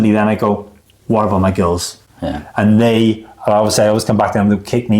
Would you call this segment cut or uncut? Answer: uncut